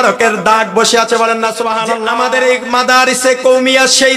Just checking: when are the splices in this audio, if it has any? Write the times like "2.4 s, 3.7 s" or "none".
2.0 s